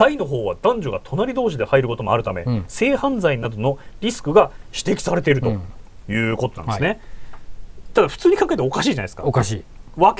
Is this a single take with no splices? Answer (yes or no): yes